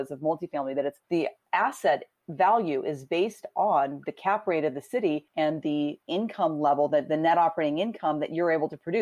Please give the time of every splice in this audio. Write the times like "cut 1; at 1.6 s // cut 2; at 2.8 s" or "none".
cut 1; at 5.3 s // cut 2; at 6.0 s